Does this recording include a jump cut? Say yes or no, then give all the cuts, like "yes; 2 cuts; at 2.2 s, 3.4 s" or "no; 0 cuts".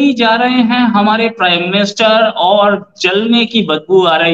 no; 0 cuts